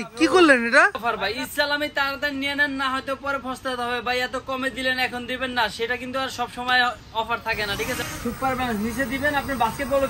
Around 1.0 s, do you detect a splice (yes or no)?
yes